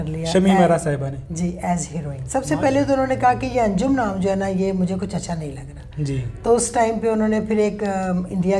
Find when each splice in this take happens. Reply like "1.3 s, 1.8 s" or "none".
2.2 s